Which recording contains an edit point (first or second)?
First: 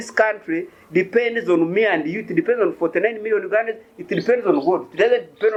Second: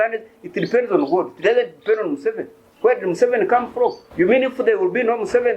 second